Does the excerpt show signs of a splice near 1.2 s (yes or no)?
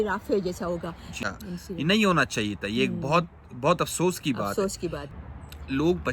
yes